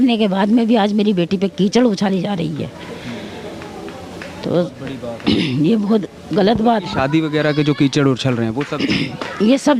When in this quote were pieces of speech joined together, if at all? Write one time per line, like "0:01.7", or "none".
none